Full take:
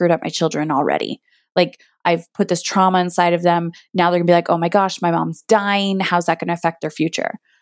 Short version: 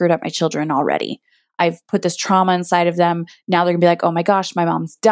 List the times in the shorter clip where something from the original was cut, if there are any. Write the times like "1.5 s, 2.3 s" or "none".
1.4 s